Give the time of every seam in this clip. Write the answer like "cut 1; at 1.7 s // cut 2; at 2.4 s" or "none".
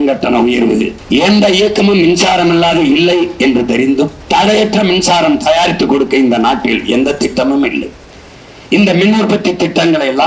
cut 1; at 1.0 s // cut 2; at 4.2 s

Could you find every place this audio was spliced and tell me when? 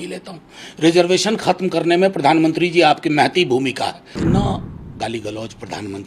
cut 1; at 4.1 s

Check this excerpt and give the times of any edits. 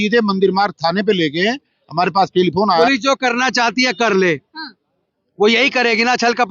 cut 1; at 2.8 s

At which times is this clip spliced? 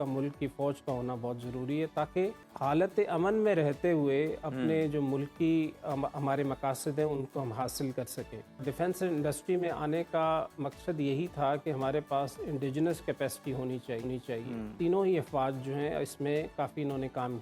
cut 1; at 2.5 s // cut 2; at 8.6 s // cut 3; at 14.7 s

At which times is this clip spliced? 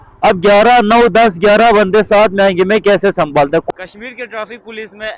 cut 1; at 3.6 s

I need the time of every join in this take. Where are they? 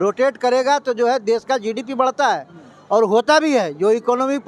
none

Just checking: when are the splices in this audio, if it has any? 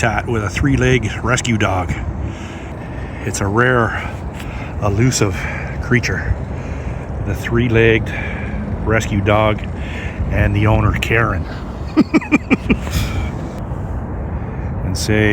cut 1; at 2.7 s // cut 2; at 13.6 s

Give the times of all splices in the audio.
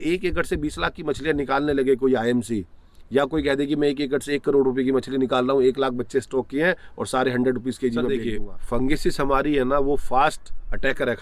cut 1; at 8.2 s

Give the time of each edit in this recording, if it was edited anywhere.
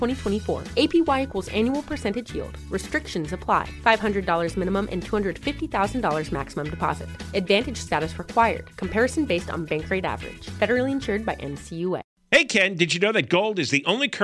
cut 1; at 12.1 s

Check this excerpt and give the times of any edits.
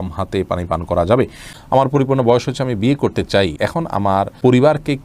cut 1; at 1.5 s // cut 2; at 4.1 s

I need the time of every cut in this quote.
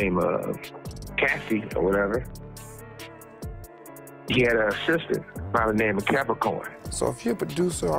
cut 1; at 6.8 s

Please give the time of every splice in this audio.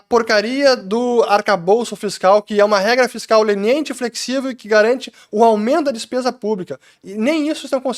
none

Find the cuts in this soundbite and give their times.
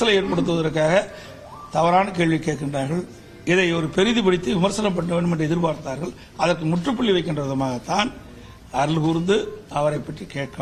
none

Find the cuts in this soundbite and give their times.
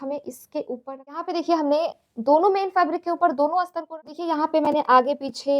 cut 1; at 1.2 s // cut 2; at 3.8 s

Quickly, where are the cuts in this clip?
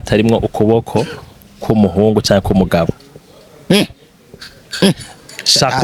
none

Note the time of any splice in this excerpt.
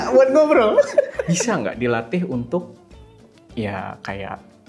cut 1; at 1.2 s

